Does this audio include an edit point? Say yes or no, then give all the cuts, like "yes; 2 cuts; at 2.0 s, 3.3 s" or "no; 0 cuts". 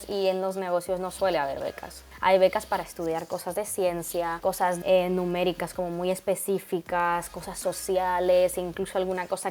yes; 2 cuts; at 2.0 s, 4.6 s